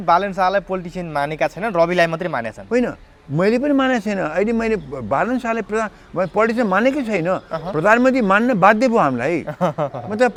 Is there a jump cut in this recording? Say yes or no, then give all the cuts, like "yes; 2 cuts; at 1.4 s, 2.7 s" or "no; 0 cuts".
no; 0 cuts